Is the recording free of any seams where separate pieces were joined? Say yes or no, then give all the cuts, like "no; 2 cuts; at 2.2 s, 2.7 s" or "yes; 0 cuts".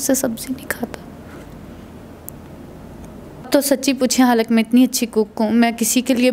no; 1 cut; at 3.5 s